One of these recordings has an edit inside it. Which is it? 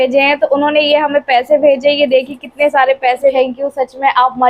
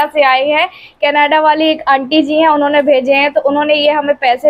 first; 1 cut; at 3.3 s

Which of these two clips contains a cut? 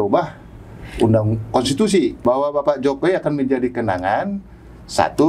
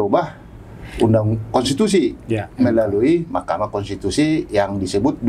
first; 1 cut; at 2.2 s

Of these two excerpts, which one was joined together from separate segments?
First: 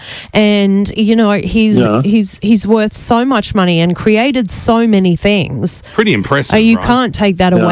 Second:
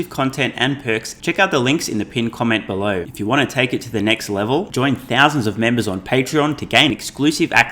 second; 2 cuts; at 1.1 s, 3.1 s

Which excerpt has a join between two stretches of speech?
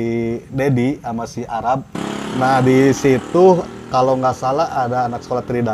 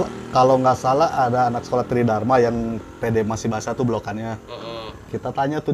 first; 1 cut; at 1.9 s

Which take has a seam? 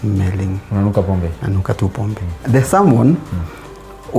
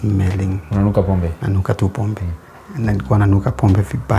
first; 1 cut; at 2.4 s

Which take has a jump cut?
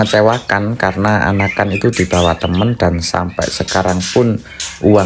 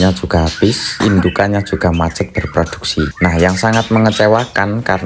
second; 2 cuts; at 1.0 s, 3.1 s

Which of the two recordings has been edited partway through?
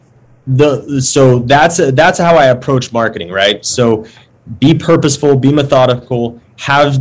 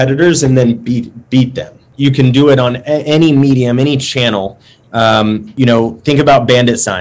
second; 2 cuts; at 1.8 s, 5.5 s

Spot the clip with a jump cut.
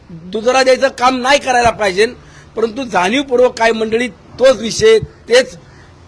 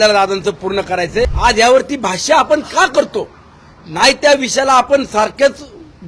second; 1 cut; at 1.3 s

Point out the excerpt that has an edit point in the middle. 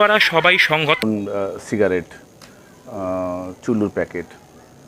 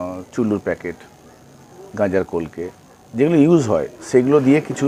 first; 1 cut; at 1.0 s

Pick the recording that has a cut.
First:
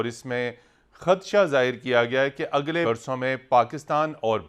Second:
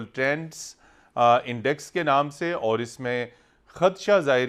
first; 1 cut; at 2.8 s

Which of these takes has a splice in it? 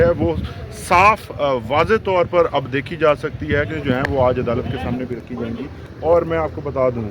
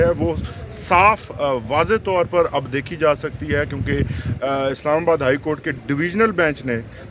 first; 1 cut; at 3.7 s

